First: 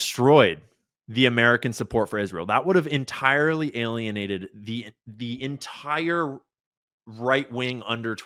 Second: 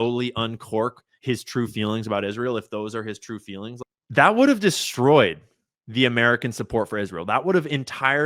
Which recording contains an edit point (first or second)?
second